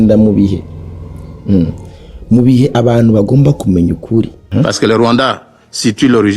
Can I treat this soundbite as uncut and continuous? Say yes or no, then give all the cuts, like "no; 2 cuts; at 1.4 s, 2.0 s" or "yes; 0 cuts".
no; 1 cut; at 4.4 s